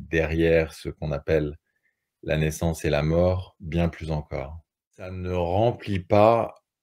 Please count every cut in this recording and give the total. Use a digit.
1